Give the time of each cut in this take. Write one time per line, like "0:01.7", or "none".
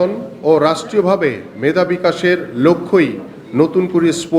none

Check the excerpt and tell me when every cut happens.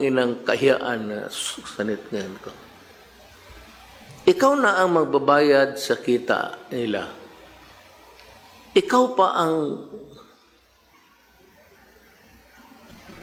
none

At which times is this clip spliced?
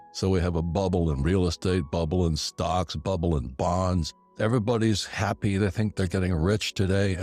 0:04.2

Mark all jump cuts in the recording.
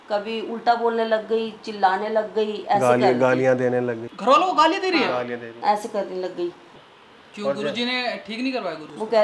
0:06.7

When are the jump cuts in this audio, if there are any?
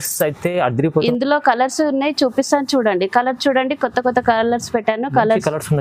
0:01.0

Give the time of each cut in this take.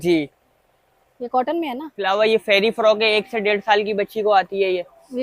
0:01.9

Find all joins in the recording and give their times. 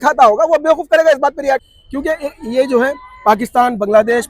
0:01.7

